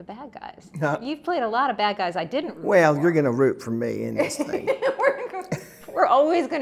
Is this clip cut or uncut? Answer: uncut